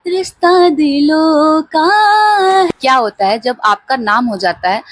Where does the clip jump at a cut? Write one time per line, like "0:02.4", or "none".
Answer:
0:02.7